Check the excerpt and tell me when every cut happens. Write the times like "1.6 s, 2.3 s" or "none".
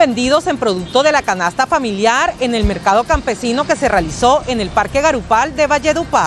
none